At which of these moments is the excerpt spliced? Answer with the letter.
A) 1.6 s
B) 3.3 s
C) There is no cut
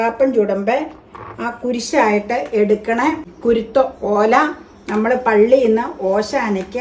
B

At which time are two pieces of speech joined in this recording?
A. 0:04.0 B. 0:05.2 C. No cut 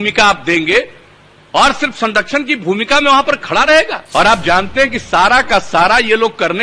A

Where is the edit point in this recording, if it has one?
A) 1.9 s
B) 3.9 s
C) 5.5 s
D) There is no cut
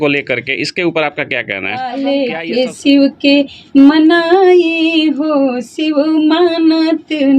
A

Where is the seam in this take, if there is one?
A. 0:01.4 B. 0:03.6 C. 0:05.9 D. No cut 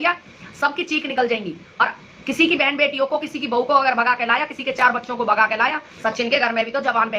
C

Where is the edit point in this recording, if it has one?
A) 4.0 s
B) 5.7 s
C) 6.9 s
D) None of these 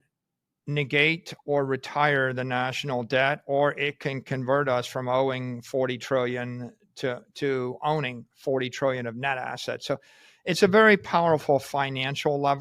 D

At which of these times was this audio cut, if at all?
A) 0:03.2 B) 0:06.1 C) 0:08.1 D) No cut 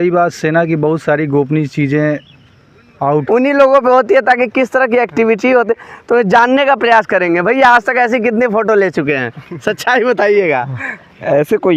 A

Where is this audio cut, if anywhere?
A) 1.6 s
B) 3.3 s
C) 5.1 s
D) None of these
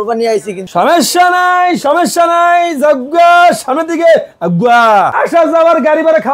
C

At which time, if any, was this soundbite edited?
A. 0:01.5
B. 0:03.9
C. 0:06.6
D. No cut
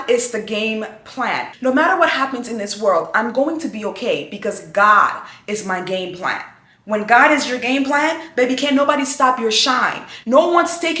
A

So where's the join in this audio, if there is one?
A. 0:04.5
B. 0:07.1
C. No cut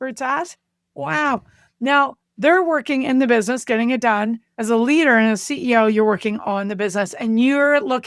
A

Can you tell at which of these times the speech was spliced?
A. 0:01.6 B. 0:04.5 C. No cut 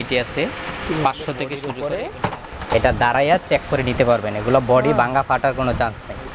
A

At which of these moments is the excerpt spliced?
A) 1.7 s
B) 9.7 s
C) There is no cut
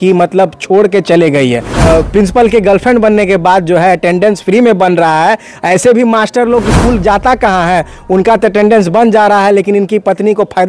A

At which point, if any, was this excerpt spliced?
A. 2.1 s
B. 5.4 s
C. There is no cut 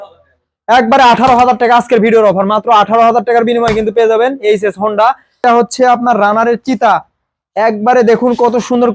B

